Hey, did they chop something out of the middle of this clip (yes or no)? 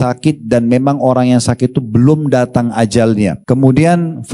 yes